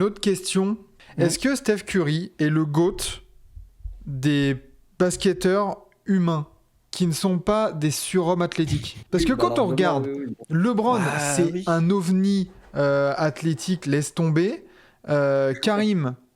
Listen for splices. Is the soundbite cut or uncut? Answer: cut